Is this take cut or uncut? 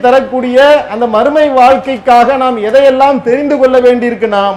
uncut